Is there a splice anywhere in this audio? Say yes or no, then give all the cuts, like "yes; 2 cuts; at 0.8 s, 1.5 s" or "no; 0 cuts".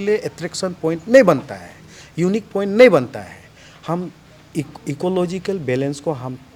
no; 0 cuts